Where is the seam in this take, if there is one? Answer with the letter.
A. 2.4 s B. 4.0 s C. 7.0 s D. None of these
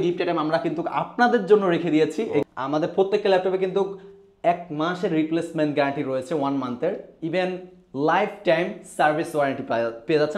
A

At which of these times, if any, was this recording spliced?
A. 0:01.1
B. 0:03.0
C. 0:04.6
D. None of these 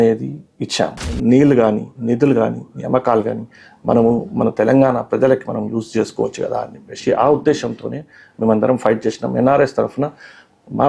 A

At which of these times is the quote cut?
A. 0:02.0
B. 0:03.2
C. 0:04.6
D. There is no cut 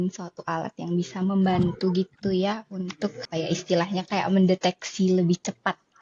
B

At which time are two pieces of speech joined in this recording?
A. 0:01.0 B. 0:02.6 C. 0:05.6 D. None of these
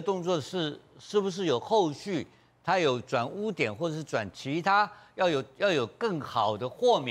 D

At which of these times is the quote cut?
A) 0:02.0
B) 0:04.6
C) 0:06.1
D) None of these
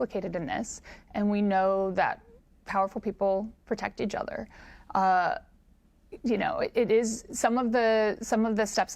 D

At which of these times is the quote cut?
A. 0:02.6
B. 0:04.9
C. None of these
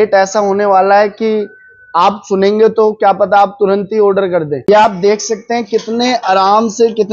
B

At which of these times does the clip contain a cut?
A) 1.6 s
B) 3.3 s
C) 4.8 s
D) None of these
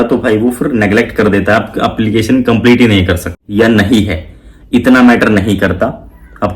B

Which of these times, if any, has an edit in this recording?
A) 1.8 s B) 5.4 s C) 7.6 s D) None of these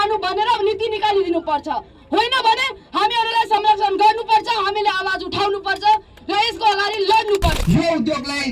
C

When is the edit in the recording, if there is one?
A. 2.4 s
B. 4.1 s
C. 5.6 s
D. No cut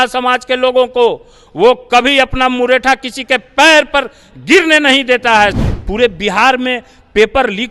C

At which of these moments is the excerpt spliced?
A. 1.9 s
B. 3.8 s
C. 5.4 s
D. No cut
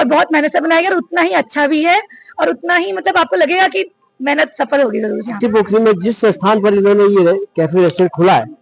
C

